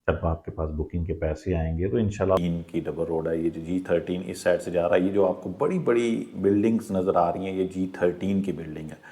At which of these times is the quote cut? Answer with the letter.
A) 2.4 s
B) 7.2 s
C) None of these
A